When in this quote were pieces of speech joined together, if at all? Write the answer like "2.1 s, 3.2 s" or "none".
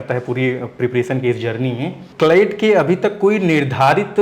2.1 s